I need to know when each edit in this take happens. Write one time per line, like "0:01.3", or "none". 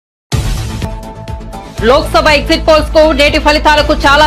none